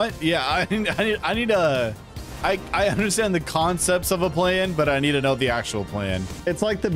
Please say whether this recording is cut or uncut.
uncut